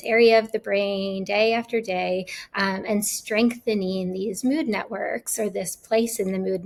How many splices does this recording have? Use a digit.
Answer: 0